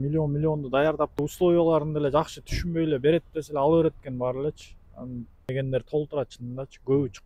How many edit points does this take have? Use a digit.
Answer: 2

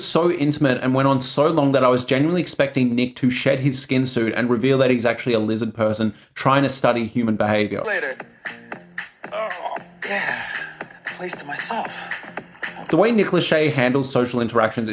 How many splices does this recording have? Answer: 0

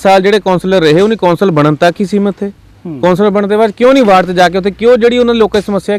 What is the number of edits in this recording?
0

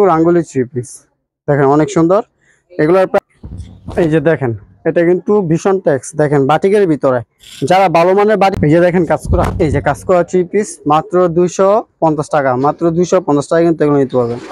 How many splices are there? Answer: 2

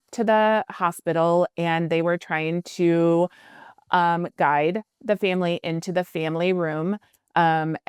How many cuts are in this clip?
0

